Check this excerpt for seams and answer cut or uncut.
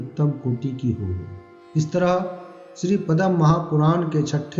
uncut